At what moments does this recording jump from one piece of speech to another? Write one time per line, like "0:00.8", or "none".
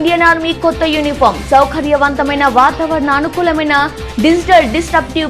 none